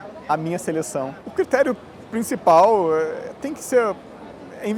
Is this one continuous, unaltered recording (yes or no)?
no